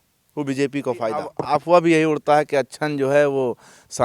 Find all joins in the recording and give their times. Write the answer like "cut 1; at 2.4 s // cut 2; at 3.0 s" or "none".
cut 1; at 1.1 s